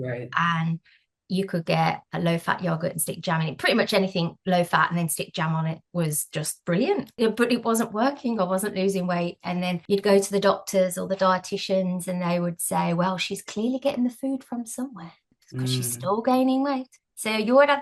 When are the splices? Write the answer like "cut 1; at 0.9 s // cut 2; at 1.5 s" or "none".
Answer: cut 1; at 7.1 s // cut 2; at 9.8 s